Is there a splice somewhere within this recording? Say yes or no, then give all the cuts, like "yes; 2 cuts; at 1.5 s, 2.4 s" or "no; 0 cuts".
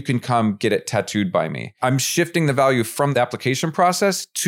yes; 2 cuts; at 1.7 s, 3.1 s